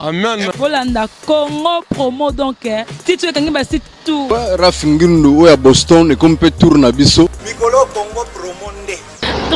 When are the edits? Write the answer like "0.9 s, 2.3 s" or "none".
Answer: 4.2 s, 7.4 s

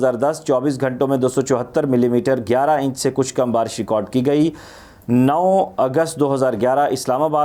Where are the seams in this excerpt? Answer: none

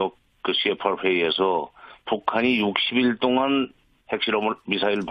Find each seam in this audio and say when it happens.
none

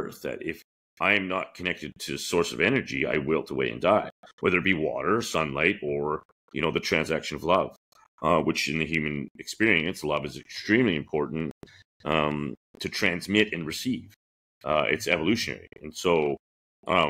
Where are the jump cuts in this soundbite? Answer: none

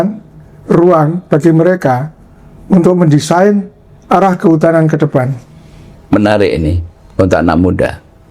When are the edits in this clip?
5.9 s

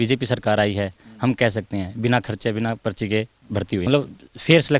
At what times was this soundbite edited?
3.8 s

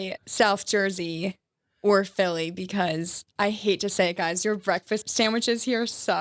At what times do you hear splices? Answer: 5.1 s

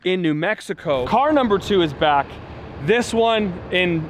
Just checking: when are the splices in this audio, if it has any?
1.1 s

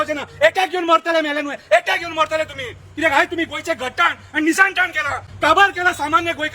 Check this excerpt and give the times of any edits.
none

